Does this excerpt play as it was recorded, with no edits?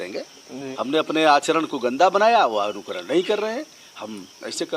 yes; 0 cuts

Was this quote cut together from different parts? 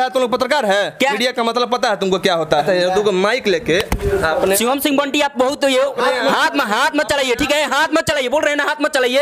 yes; 2 cuts; at 1.2 s, 2.6 s

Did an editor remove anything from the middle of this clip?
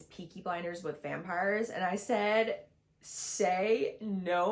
no; 0 cuts

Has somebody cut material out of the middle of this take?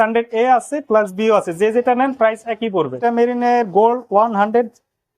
yes; 1 cut; at 3.0 s

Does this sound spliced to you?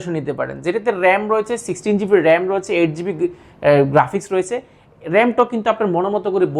no; 0 cuts

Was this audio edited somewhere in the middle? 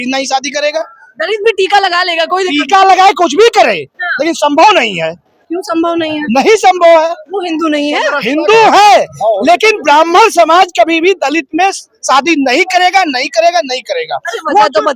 no; 0 cuts

